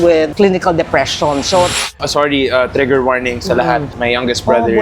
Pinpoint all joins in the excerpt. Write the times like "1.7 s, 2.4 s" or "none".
1.9 s, 3.9 s